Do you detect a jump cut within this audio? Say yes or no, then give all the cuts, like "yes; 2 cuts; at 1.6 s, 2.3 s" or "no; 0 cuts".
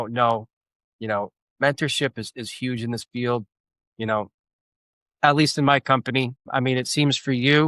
no; 0 cuts